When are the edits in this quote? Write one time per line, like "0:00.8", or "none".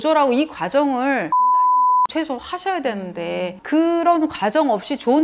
none